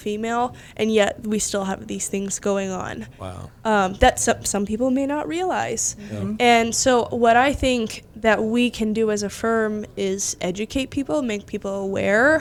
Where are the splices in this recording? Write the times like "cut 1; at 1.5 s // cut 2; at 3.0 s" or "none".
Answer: none